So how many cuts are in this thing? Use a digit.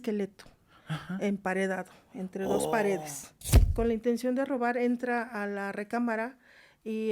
1